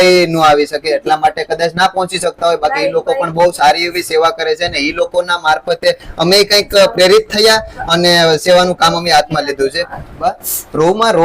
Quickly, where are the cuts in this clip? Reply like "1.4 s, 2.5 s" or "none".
10.2 s